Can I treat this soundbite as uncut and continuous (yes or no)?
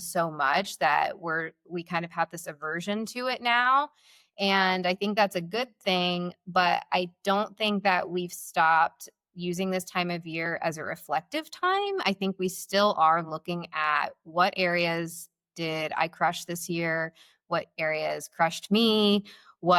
yes